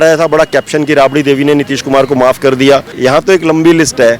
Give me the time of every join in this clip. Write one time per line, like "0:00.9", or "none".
0:02.9

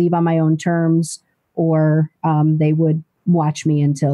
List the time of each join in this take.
none

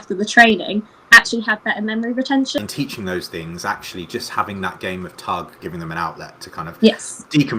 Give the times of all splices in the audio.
0:02.6
0:05.6

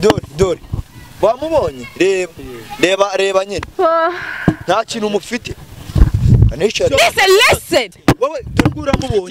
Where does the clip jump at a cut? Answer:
0:07.0

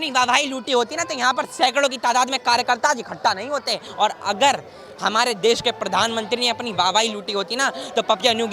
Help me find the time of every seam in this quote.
0:03.8

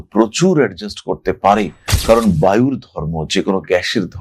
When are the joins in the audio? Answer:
none

